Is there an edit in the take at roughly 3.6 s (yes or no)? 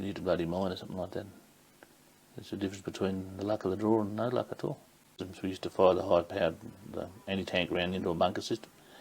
no